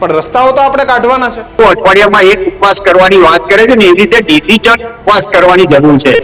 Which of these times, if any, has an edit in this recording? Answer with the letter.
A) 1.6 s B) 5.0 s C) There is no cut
A